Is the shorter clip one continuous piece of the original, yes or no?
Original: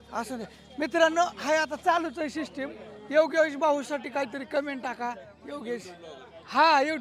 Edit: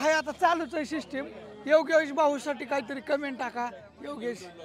yes